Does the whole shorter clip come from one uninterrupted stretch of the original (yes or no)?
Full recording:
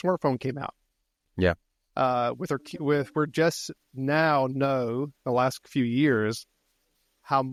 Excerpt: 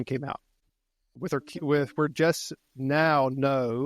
no